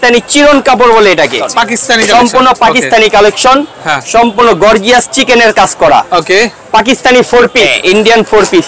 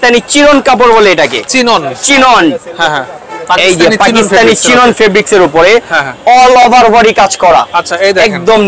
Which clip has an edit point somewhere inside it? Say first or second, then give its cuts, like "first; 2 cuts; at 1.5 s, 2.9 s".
first; 2 cuts; at 1.4 s, 7.7 s